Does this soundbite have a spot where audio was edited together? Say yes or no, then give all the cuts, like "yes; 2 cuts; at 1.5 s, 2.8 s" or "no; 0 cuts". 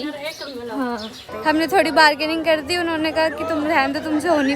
yes; 1 cut; at 1.3 s